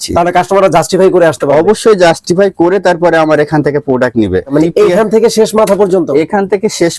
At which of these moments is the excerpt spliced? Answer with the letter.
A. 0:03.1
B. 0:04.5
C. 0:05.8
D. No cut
B